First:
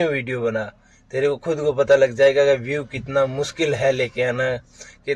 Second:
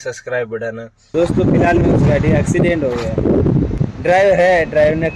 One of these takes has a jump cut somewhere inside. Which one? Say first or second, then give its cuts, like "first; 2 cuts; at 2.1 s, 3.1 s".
second; 2 cuts; at 1.1 s, 3.7 s